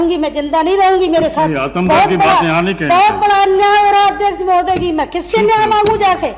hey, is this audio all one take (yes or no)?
yes